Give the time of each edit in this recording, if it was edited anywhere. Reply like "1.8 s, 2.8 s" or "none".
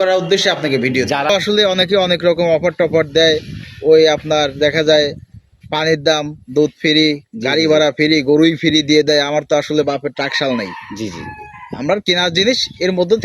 1.3 s